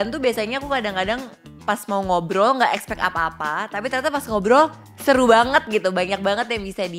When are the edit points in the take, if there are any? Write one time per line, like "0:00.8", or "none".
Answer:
0:04.9